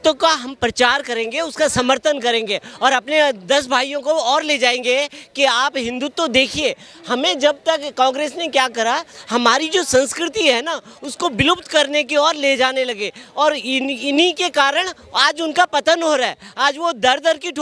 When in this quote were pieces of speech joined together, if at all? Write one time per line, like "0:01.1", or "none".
none

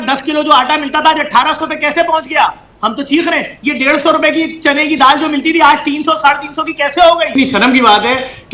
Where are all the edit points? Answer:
0:07.3

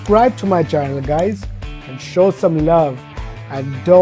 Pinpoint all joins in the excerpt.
none

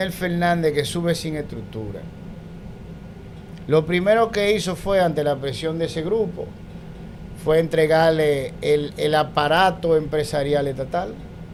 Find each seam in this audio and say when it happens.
none

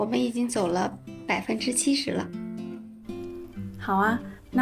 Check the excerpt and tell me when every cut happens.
none

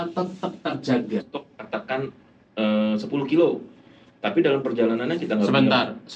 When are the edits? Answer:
0:01.2

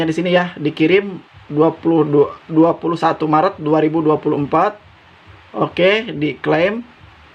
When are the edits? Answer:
none

